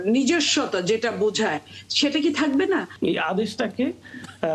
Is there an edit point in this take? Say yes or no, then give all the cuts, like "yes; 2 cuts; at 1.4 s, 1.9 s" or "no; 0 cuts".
yes; 1 cut; at 2.9 s